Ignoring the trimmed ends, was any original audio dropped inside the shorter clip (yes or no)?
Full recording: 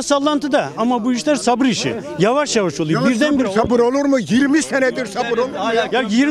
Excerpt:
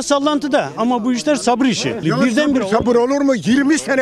yes